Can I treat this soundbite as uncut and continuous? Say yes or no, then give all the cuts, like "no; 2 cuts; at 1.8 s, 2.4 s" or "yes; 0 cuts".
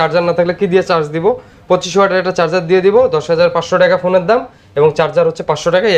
yes; 0 cuts